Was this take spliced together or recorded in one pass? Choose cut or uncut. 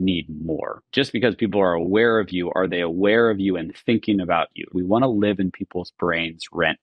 cut